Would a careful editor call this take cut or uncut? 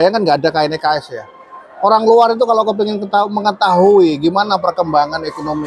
uncut